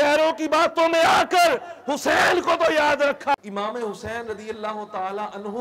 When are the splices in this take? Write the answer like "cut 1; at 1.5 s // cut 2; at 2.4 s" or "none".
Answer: cut 1; at 3.4 s